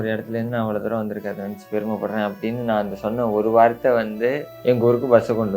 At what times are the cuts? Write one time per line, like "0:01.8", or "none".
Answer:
0:04.5